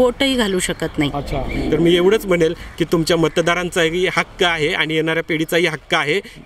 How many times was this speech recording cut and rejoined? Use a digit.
1